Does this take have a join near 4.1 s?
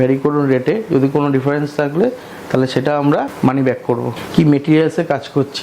yes; 2 cuts; at 3.3 s, 4.1 s

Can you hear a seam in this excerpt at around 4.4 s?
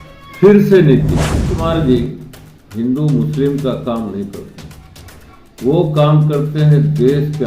no; 1 cut; at 1.6 s

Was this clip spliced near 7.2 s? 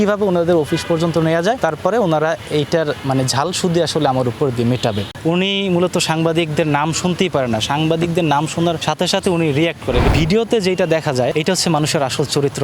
no; 5 cuts; at 1.6 s, 5.1 s, 8.8 s, 10.1 s, 11.3 s

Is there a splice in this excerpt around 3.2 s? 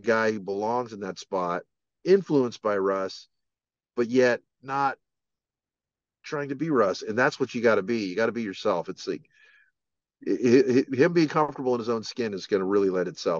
no; 0 cuts

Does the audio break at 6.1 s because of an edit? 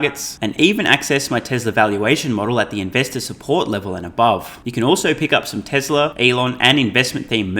yes; 2 cuts; at 4.6 s, 6.1 s

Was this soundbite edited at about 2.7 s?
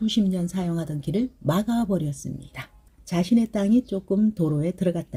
no; 0 cuts

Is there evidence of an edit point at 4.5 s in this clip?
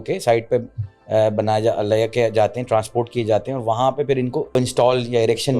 yes; 1 cut; at 4.5 s

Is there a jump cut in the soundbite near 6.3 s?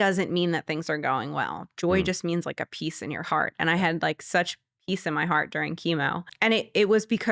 yes; 1 cut; at 6.3 s

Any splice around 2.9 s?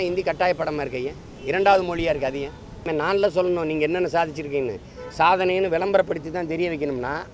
yes; 2 cuts; at 1.3 s, 2.9 s

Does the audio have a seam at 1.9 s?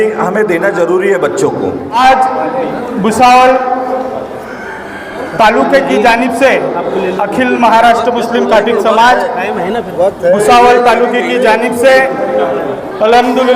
yes; 1 cut; at 1.9 s

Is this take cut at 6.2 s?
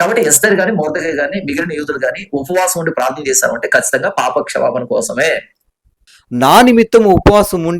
yes; 1 cut; at 6.2 s

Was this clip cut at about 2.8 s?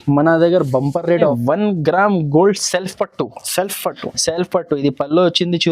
no; 1 cut; at 1.3 s

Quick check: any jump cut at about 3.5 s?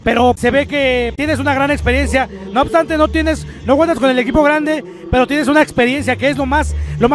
no; 0 cuts

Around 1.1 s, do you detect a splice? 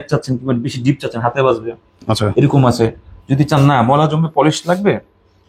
no; 0 cuts

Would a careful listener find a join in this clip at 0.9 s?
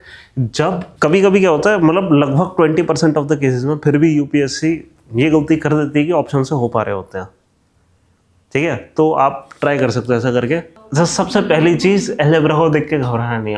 yes; 2 cuts; at 0.9 s, 10.8 s

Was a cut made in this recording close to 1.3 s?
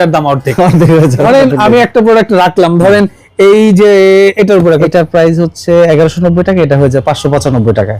yes; 2 cuts; at 1.3 s, 4.9 s

